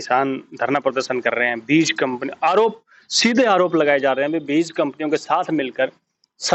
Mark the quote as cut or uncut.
uncut